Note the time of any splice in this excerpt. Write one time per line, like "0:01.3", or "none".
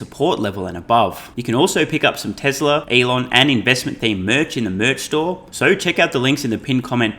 0:01.3
0:02.9
0:05.5